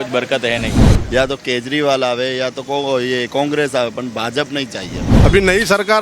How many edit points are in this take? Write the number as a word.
two